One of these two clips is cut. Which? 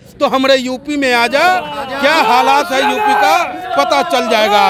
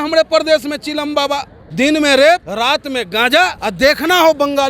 second; 3 cuts; at 1.6 s, 2.5 s, 3.6 s

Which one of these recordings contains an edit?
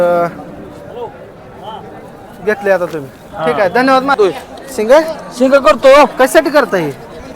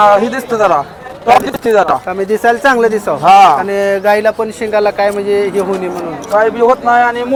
first; 1 cut; at 4.1 s

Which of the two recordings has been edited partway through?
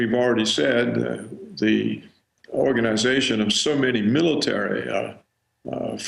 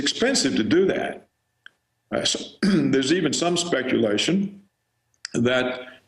second; 1 cut; at 3.6 s

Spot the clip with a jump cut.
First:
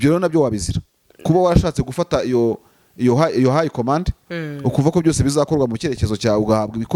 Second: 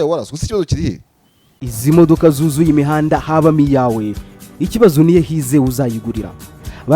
second; 1 cut; at 1.7 s

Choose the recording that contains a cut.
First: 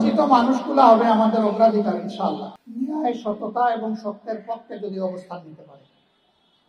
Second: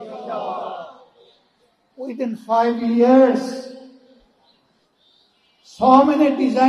first; 1 cut; at 2.6 s

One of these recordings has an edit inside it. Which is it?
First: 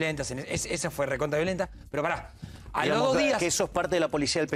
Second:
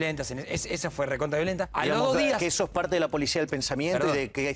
second; 1 cut; at 1.7 s

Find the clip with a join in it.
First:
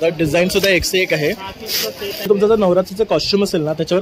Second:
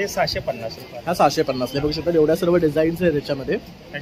first; 1 cut; at 2.3 s

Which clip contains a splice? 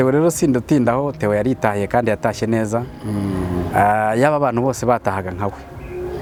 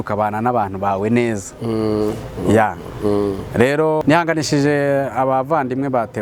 second; 1 cut; at 4.0 s

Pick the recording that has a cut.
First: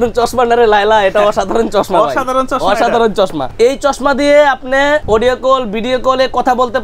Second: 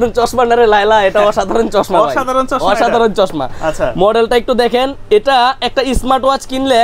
first; 2 cuts; at 3.5 s, 5.0 s

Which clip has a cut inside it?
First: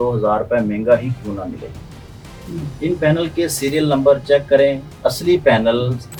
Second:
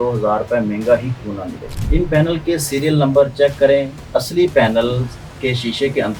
second; 1 cut; at 1.7 s

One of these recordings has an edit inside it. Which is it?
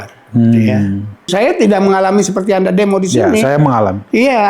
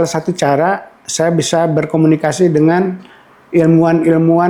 first; 1 cut; at 1.3 s

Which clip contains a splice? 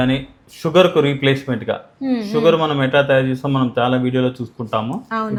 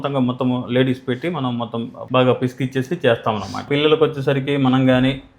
second; 2 cuts; at 2.0 s, 3.7 s

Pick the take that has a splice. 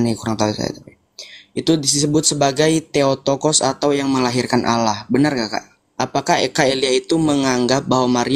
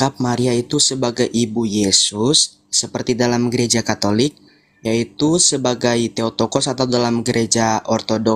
first; 1 cut; at 5.8 s

